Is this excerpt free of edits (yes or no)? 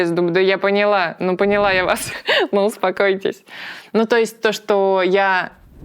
yes